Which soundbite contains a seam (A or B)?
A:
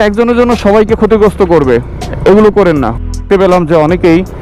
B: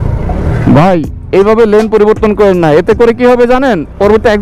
A